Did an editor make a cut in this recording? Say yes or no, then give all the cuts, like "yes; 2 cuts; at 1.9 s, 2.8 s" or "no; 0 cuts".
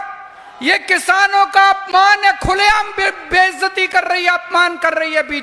no; 0 cuts